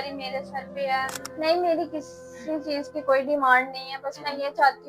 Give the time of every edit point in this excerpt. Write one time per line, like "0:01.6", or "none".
0:01.2